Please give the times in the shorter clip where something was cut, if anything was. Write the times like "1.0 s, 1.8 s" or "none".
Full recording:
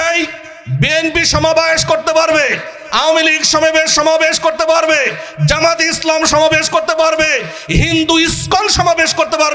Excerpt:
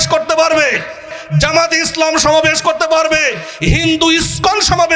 1.1 s